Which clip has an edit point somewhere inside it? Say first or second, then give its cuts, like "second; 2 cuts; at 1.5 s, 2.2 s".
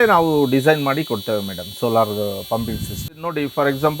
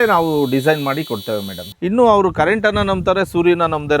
second; 1 cut; at 1.6 s